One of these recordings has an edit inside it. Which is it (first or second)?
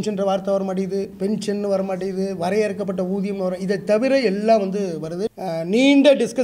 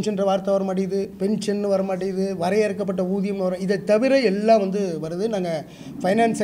first